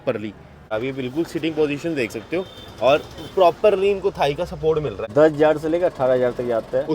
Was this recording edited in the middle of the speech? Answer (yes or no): yes